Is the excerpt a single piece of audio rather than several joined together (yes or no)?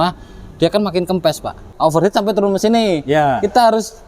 no